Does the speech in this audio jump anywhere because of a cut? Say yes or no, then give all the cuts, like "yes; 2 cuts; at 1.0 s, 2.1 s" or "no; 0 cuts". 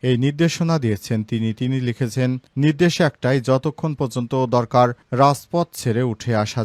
no; 0 cuts